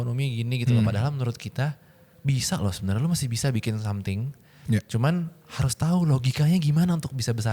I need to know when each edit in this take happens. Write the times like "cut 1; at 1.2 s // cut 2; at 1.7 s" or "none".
none